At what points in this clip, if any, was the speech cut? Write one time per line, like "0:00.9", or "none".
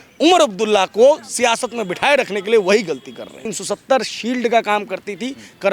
0:03.5